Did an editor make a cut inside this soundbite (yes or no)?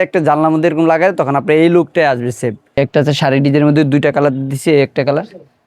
yes